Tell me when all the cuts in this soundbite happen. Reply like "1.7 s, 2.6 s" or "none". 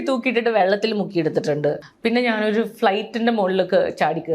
1.9 s